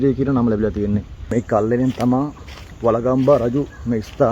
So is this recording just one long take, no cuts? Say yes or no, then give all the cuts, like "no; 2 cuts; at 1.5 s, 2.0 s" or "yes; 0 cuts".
no; 1 cut; at 1.3 s